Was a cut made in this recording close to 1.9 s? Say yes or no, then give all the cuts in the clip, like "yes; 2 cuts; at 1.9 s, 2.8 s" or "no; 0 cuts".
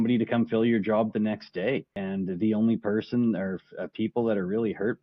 yes; 1 cut; at 1.9 s